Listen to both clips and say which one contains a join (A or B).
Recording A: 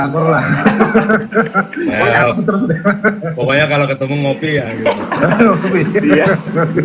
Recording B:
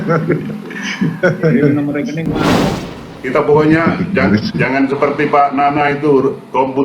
B